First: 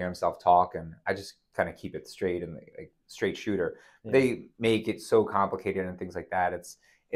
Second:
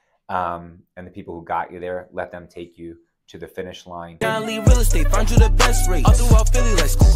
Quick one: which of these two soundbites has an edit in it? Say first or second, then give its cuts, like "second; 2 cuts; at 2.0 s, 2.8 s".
second; 1 cut; at 4.2 s